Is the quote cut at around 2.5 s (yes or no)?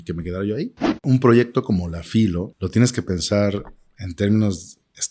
yes